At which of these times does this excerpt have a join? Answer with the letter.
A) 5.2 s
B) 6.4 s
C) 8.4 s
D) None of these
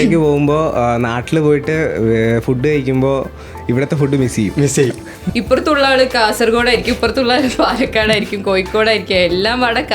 A